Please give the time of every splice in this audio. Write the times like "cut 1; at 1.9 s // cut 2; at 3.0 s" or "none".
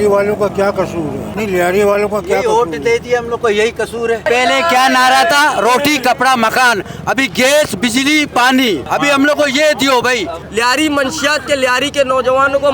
cut 1; at 1.2 s // cut 2; at 4.2 s // cut 3; at 10.3 s